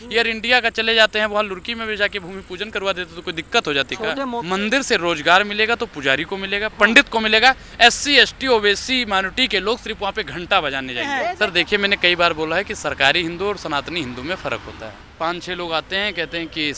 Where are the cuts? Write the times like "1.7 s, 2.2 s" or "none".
4.3 s, 11.3 s, 15.0 s